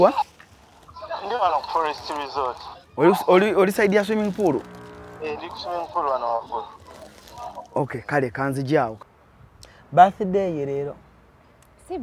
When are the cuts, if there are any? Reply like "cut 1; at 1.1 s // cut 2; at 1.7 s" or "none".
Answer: cut 1; at 9.1 s